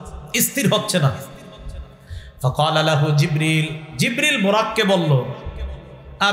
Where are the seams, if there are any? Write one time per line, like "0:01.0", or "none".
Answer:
none